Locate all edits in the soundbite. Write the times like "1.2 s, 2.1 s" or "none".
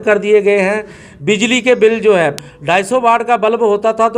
2.3 s